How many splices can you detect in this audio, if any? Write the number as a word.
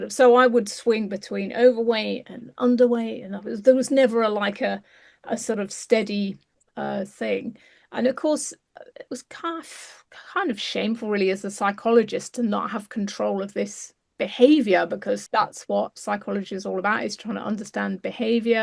one